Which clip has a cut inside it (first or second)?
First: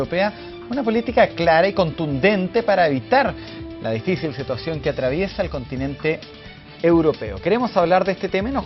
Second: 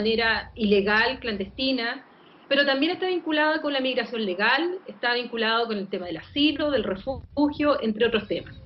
first